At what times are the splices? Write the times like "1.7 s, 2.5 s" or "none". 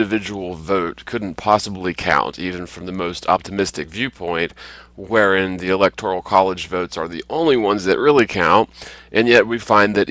1.7 s